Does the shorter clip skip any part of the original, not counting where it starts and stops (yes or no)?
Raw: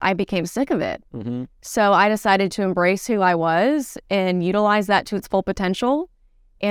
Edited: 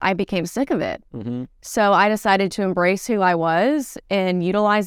no